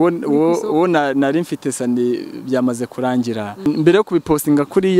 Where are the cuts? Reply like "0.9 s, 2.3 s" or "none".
3.7 s

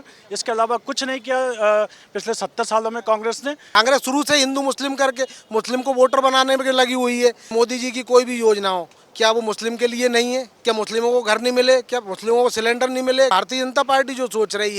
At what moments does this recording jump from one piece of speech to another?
3.8 s, 7.5 s, 10.5 s, 13.3 s

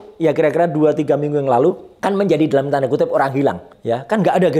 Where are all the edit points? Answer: 1.9 s, 3.7 s

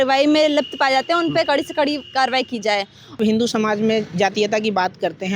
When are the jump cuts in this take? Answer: 3.2 s

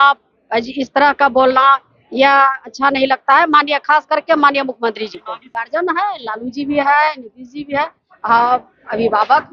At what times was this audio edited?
5.5 s

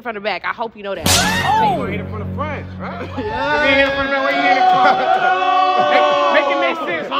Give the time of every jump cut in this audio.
none

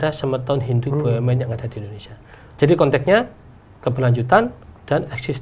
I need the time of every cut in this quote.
none

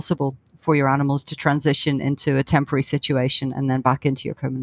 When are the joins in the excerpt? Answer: none

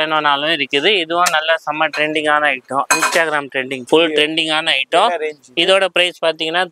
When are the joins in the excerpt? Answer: 3.8 s

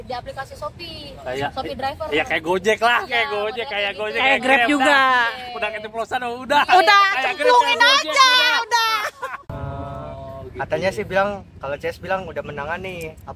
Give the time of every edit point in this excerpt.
9.5 s

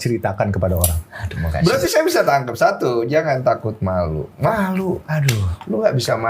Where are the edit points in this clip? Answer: 1.5 s

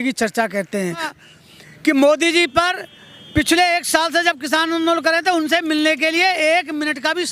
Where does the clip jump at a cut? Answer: 1.1 s

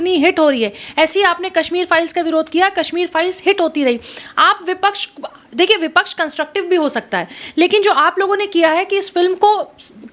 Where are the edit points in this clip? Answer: none

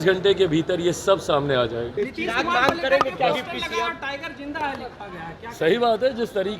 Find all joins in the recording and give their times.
1.9 s

